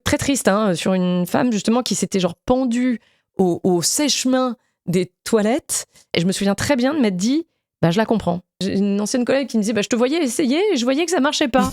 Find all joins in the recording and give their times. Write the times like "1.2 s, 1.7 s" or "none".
6.1 s, 8.6 s